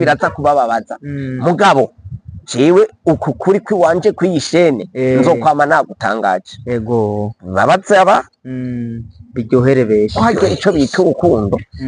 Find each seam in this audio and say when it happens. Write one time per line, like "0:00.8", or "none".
0:10.1